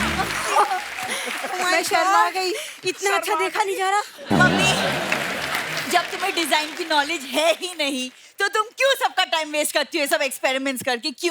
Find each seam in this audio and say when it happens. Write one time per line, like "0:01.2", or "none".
none